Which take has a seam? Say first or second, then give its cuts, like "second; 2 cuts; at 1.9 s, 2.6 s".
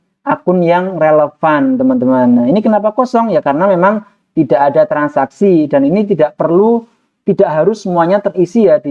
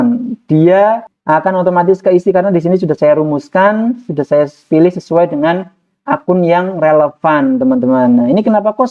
second; 1 cut; at 1.1 s